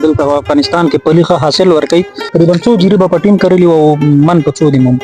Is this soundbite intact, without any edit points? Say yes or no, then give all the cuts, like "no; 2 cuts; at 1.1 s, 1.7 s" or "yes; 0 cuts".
no; 1 cut; at 2.3 s